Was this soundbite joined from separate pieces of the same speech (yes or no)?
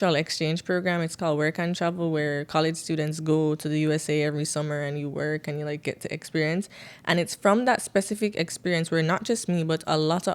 no